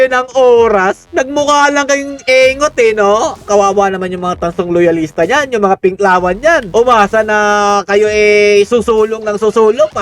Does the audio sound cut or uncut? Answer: cut